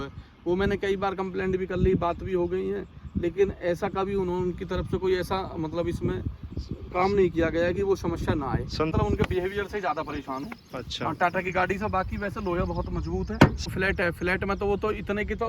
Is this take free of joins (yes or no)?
no